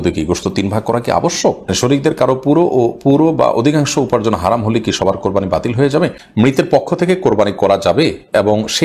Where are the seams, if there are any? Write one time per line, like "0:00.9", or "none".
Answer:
0:01.7
0:06.2